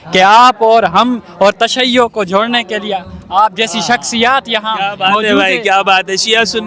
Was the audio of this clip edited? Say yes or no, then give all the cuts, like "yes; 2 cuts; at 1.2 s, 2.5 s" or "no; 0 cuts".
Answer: no; 0 cuts